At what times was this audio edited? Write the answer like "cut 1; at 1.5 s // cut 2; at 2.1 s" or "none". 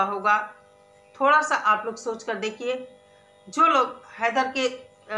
none